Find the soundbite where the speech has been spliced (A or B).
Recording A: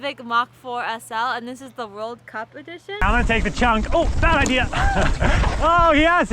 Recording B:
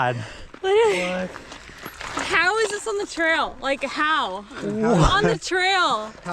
A